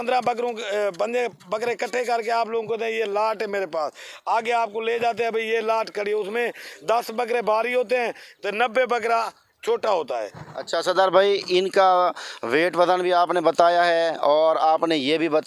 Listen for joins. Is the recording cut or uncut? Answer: uncut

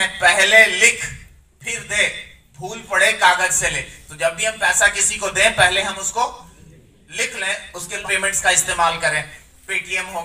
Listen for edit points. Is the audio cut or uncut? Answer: cut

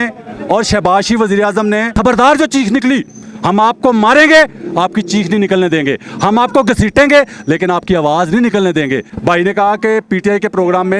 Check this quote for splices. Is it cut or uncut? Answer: cut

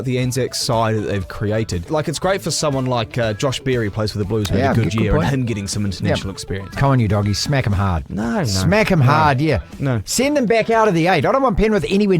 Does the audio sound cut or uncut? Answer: cut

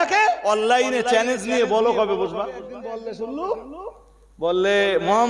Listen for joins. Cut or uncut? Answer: cut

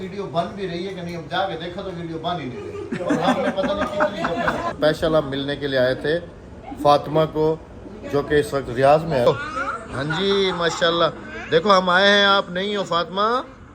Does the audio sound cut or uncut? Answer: cut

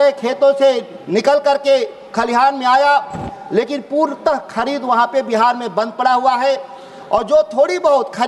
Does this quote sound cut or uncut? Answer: uncut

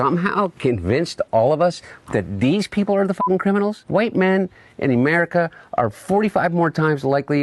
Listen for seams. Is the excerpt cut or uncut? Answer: cut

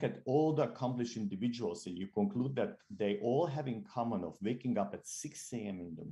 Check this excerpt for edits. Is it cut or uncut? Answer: uncut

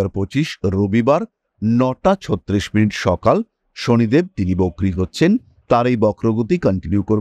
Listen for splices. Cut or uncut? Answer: uncut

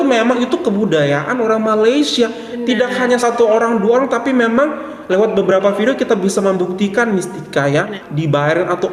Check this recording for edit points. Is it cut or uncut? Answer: uncut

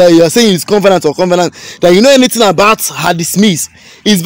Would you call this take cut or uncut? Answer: uncut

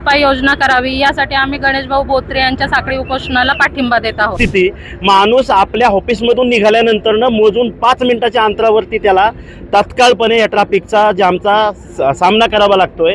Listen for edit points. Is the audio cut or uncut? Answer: cut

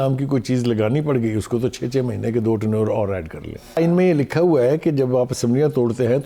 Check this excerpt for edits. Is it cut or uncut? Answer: cut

